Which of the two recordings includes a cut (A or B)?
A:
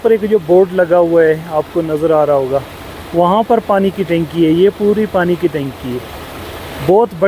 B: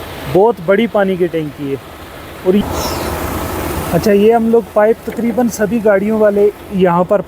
B